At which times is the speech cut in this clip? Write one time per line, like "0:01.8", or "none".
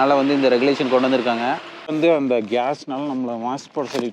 0:01.9

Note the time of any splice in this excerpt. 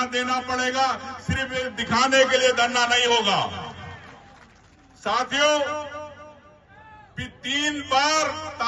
none

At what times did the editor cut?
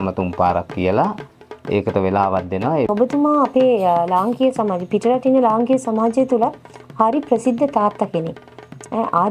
0:02.9

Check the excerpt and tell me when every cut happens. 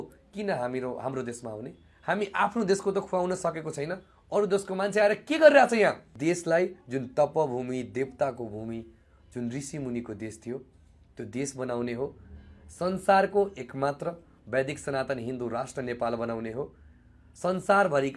0:06.1

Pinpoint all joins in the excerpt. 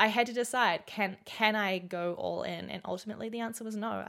none

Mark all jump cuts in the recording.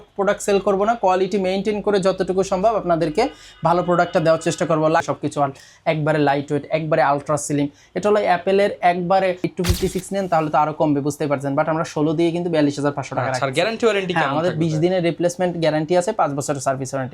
0:05.0
0:09.4

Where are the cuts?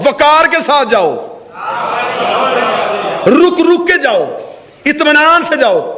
none

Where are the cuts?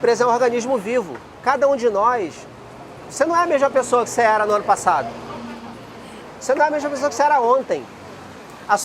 0:01.2

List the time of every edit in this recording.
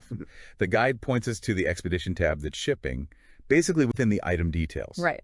0:04.2

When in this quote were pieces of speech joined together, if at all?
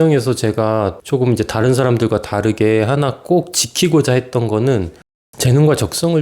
0:01.0
0:05.3

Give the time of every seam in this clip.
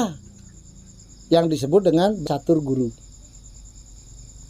0:02.2

